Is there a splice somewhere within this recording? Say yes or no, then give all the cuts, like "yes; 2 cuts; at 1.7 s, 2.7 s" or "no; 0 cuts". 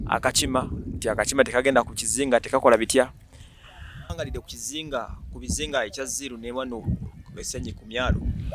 yes; 1 cut; at 4.1 s